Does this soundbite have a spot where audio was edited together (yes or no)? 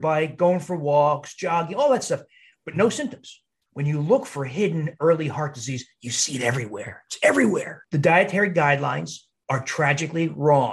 yes